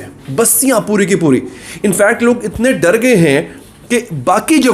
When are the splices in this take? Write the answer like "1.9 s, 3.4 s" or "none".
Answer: none